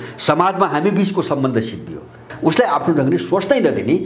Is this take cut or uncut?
cut